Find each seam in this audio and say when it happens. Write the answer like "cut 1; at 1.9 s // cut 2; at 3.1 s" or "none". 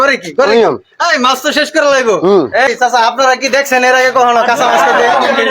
cut 1; at 2.7 s